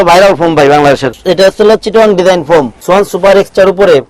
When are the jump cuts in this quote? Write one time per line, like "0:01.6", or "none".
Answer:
0:01.1
0:02.8